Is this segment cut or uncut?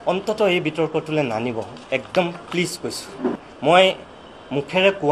uncut